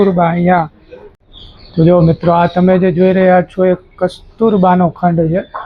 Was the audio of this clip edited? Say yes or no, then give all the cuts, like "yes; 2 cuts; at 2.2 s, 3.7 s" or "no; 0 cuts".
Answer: yes; 1 cut; at 1.2 s